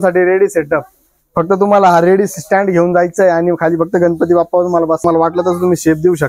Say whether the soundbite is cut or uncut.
cut